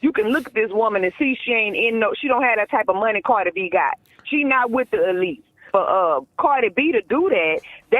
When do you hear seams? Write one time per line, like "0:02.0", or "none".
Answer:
0:05.6